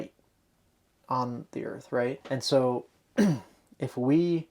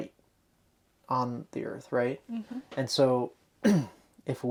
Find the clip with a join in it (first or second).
first